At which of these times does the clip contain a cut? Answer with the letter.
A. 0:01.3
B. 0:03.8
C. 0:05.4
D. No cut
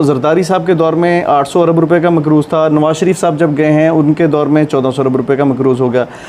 D